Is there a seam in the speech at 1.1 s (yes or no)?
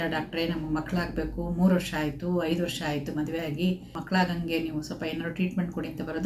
no